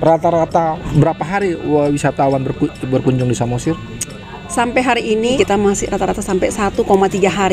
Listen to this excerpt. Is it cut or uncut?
cut